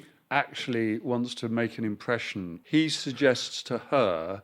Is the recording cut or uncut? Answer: cut